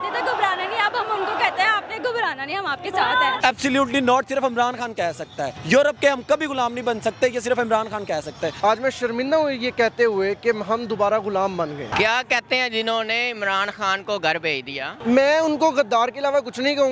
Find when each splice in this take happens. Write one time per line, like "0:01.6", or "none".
0:03.4
0:05.5
0:08.5
0:11.8
0:14.9